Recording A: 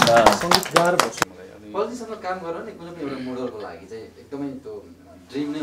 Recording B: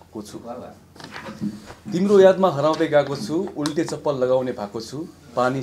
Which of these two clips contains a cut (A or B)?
A